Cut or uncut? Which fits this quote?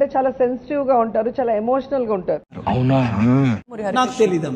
cut